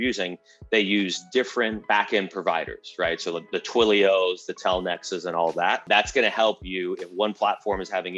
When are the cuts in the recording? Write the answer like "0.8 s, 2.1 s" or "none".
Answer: 1.8 s, 5.8 s